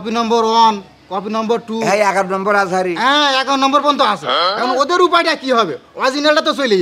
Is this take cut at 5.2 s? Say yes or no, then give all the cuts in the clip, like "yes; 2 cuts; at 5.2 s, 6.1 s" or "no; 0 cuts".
no; 0 cuts